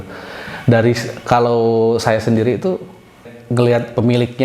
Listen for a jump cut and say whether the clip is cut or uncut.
cut